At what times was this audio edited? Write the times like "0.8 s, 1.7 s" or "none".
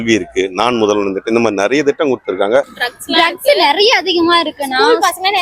2.8 s